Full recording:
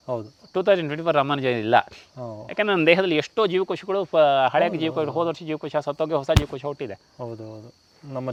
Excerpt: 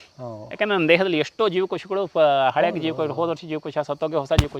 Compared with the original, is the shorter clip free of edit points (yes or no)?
yes